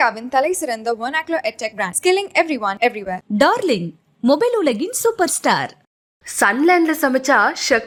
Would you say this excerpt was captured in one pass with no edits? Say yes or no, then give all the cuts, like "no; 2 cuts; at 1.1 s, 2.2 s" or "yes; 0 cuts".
yes; 0 cuts